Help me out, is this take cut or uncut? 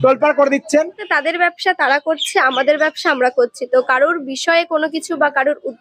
cut